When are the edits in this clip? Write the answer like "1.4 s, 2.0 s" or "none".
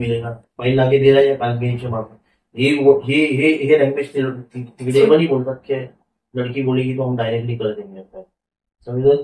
5.0 s